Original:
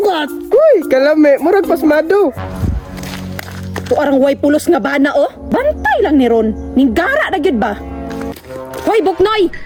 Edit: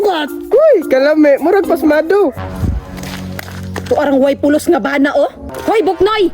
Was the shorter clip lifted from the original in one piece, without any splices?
no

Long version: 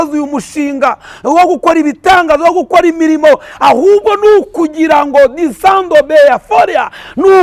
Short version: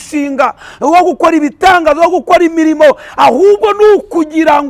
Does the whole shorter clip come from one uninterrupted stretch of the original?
yes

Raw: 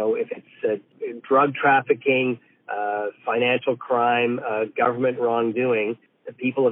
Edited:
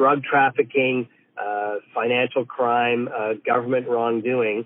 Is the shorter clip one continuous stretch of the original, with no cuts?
yes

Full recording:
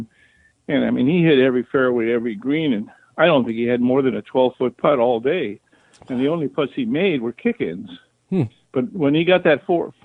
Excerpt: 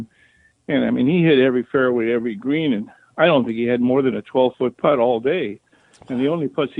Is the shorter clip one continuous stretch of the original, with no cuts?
yes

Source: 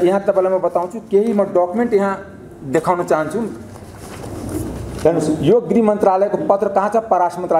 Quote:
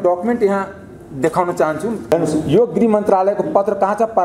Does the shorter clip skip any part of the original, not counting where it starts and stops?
yes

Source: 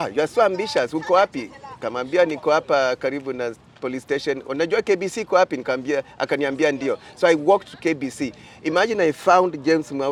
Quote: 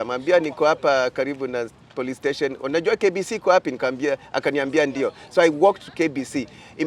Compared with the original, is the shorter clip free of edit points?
yes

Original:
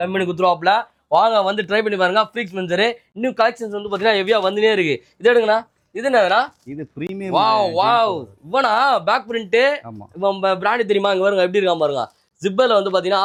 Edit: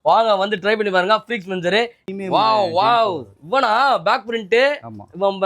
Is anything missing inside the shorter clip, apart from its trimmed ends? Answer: yes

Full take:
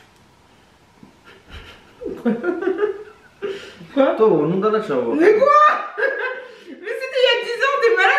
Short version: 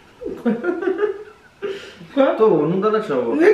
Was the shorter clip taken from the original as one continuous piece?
yes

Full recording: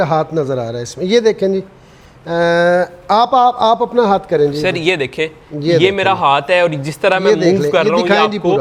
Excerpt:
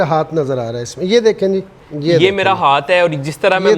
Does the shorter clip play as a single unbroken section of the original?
no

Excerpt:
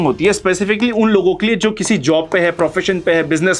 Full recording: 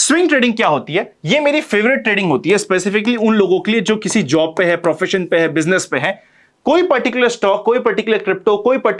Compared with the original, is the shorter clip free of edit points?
yes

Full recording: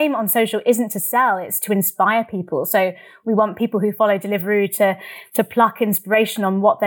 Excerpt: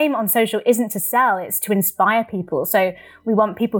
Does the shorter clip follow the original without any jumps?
yes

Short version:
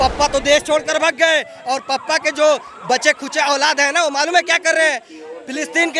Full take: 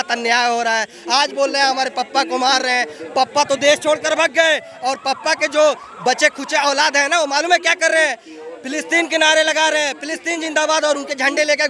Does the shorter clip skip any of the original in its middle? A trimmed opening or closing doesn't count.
no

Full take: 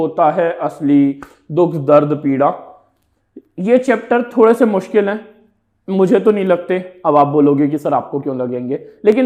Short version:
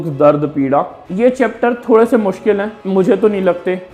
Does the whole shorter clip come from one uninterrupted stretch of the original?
no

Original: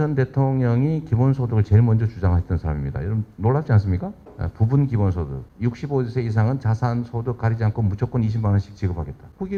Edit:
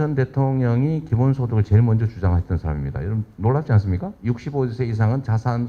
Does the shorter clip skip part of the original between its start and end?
yes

